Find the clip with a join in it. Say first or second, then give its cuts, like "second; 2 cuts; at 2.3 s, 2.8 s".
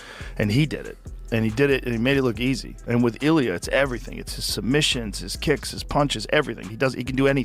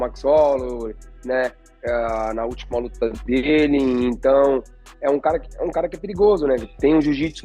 first; 1 cut; at 2.7 s